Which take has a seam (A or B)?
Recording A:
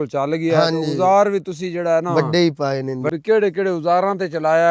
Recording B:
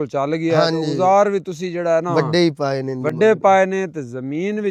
A